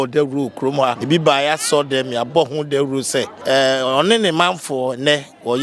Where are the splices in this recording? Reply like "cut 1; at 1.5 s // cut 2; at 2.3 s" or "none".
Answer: cut 1; at 1.0 s // cut 2; at 3.3 s